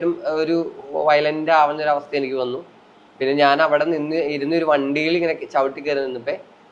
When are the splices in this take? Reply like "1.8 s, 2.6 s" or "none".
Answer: none